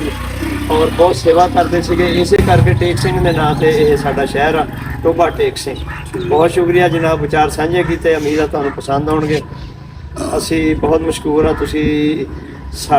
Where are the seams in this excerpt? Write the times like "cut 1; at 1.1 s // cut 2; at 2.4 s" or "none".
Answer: none